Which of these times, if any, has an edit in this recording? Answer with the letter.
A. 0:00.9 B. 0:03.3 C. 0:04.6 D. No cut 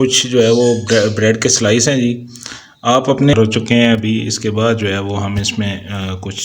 B